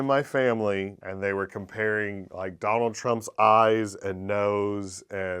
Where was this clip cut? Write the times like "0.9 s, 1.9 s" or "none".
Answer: 1.0 s